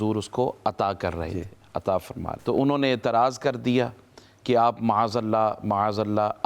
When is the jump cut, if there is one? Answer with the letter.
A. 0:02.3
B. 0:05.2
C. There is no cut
A